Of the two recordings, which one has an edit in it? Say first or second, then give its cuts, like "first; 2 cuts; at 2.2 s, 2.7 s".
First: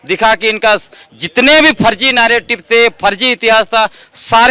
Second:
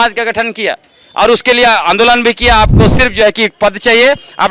second; 1 cut; at 2.7 s